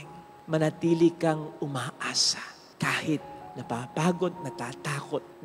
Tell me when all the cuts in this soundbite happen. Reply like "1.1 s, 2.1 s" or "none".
none